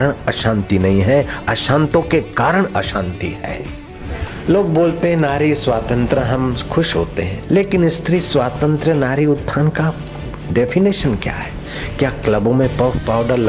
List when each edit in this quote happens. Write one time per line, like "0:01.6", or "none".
0:04.3
0:07.4